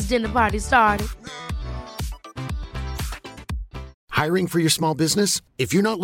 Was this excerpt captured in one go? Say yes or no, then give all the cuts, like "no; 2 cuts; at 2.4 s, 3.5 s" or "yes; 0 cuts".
no; 1 cut; at 4.0 s